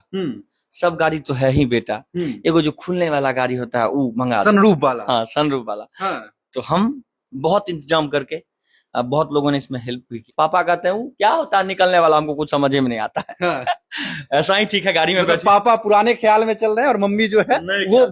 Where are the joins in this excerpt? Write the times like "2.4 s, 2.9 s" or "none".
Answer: 10.2 s